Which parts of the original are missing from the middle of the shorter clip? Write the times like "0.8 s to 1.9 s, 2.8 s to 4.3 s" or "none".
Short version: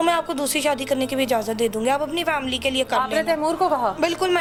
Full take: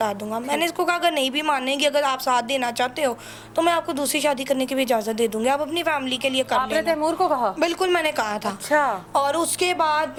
none